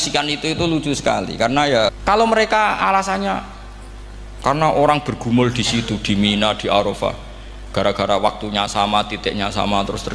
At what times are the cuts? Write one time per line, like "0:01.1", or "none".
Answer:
0:02.0